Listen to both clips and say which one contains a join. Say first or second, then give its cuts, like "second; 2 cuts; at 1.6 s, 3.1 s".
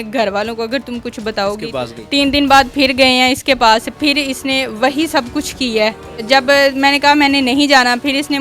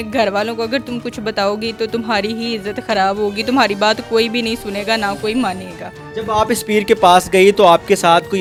first; 2 cuts; at 1.7 s, 6.2 s